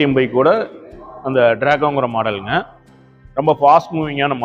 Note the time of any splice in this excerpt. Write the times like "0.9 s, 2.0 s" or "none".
none